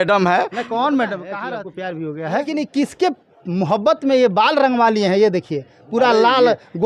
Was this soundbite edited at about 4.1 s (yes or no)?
no